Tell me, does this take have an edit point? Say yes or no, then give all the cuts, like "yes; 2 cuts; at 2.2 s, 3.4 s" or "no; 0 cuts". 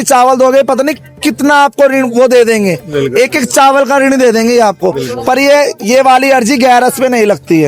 no; 0 cuts